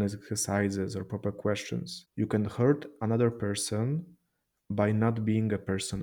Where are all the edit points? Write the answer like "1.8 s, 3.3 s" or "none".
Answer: 2.0 s